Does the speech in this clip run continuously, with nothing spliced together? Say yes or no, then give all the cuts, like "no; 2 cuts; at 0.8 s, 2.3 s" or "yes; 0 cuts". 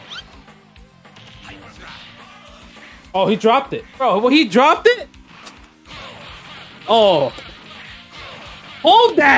no; 2 cuts; at 3.0 s, 3.8 s